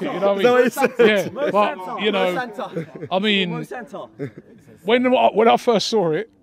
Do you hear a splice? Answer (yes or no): no